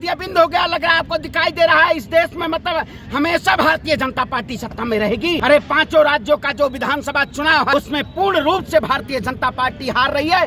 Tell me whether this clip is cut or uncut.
cut